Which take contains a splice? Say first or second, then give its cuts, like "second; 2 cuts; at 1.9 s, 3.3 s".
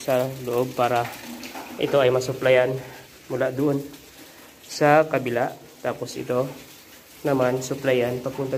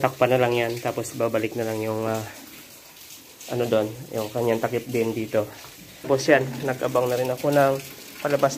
second; 1 cut; at 6.1 s